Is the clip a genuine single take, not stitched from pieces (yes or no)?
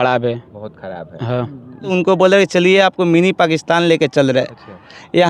no